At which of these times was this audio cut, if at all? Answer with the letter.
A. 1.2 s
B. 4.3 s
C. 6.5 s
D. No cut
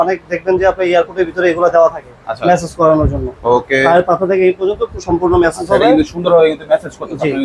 D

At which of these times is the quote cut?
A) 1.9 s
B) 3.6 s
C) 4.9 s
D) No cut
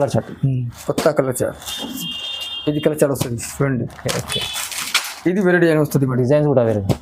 D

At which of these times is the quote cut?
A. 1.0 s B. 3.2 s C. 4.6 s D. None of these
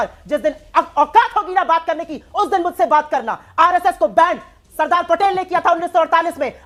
D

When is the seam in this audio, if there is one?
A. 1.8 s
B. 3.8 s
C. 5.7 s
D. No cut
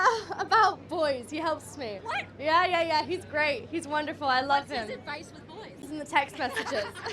C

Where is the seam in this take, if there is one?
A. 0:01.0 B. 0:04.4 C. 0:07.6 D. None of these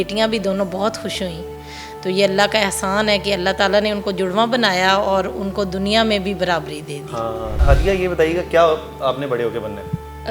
C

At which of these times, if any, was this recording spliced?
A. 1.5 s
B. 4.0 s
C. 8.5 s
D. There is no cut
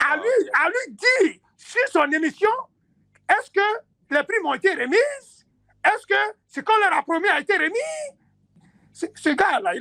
C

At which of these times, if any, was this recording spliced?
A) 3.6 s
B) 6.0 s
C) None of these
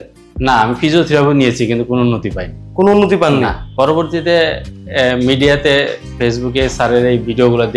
A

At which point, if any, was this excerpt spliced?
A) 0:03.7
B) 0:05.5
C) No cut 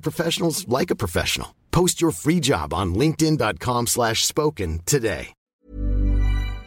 B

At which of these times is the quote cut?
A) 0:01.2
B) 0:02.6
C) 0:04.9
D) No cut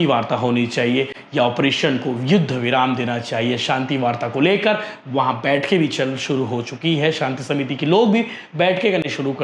D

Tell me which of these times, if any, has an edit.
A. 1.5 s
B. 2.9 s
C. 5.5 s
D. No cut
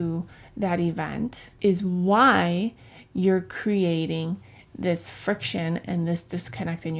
A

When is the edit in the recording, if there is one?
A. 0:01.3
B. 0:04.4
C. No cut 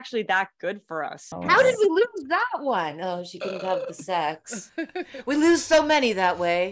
A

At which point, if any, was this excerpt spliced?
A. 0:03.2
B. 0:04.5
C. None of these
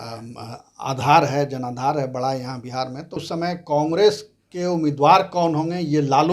A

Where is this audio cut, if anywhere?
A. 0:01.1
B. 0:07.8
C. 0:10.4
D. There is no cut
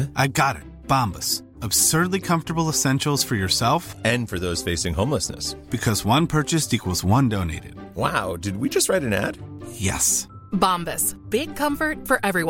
D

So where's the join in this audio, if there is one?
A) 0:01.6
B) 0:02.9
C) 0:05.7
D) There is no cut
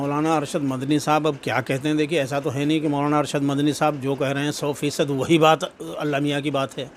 D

